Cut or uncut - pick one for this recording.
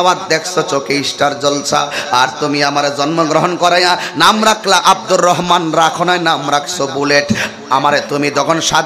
uncut